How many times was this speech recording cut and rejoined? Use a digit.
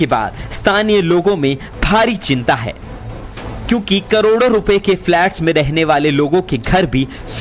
1